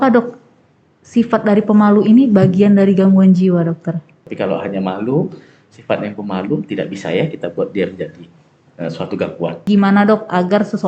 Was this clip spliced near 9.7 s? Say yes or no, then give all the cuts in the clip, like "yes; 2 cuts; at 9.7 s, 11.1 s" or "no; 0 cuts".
yes; 2 cuts; at 4.3 s, 9.7 s